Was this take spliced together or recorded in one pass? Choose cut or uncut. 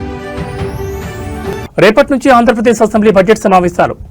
cut